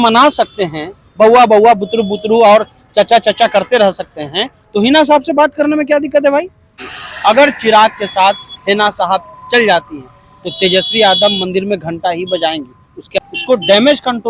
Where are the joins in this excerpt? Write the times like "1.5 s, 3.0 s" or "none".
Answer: 6.8 s, 13.2 s